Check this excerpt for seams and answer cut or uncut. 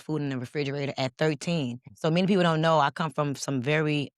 cut